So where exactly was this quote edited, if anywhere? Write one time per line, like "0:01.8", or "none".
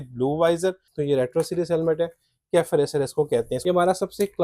0:00.9
0:03.5